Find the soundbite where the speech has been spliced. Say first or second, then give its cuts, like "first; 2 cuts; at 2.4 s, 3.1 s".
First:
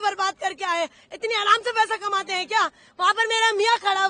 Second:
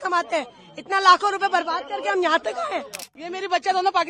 second; 1 cut; at 3.1 s